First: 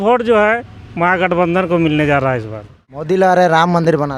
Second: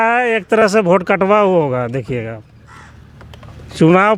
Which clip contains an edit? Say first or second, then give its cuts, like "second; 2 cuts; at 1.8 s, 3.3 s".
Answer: first; 1 cut; at 3.0 s